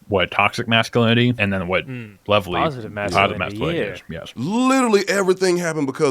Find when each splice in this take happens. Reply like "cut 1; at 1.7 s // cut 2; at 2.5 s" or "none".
cut 1; at 1.4 s // cut 2; at 4.3 s